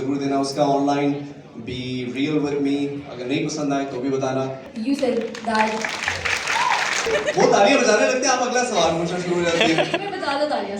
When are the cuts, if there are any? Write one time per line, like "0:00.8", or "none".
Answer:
0:04.7
0:07.1